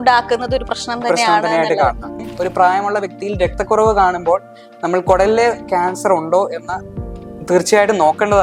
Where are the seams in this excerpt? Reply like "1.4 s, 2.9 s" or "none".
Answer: 2.2 s

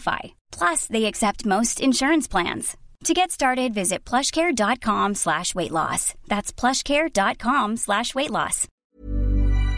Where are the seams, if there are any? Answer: 8.7 s

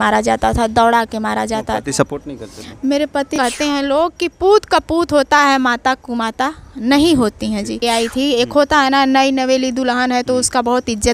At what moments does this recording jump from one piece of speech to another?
3.3 s, 7.8 s

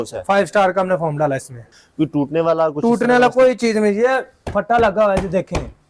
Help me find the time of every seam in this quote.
1.7 s

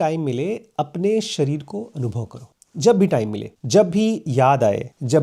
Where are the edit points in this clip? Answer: none

